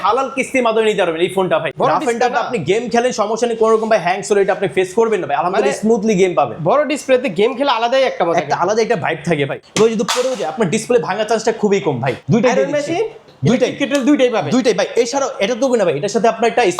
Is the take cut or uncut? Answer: cut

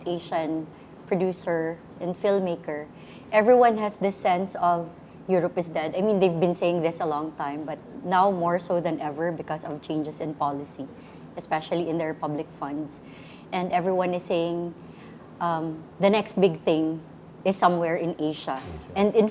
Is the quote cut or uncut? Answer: uncut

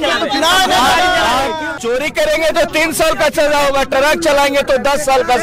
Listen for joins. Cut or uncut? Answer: cut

